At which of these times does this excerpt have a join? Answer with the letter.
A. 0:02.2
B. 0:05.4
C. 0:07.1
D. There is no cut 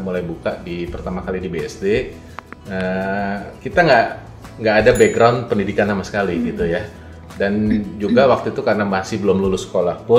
D